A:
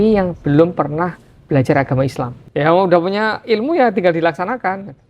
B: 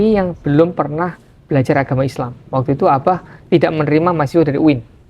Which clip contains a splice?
A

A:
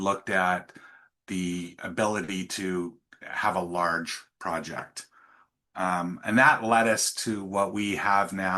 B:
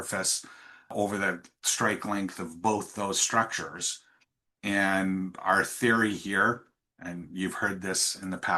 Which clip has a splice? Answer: B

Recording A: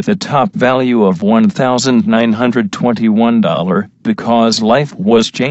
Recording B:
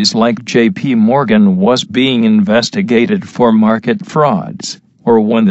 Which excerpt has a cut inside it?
B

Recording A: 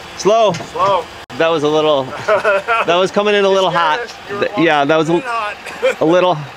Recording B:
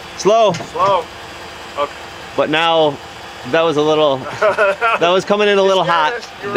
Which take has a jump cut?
A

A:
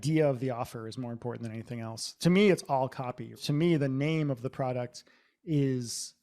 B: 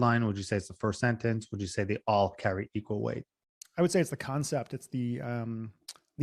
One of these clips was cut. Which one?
A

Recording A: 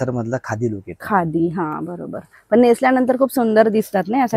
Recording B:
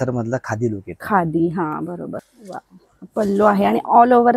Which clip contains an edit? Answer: B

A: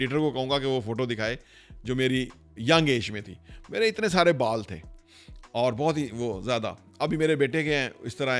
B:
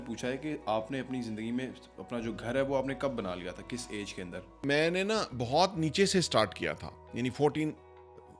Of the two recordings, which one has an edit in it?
B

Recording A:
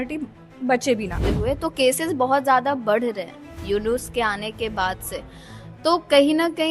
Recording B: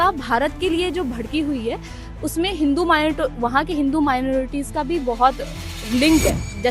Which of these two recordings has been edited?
A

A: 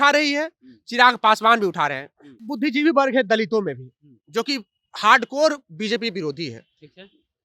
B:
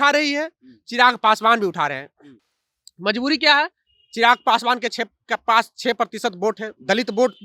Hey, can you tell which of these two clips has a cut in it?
A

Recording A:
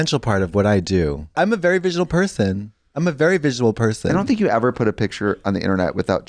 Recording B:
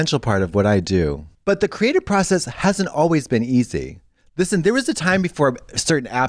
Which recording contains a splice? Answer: B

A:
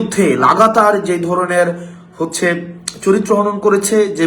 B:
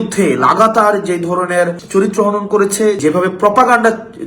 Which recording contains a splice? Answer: B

